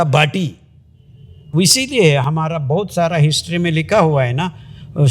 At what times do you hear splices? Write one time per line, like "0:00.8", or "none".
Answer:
0:01.5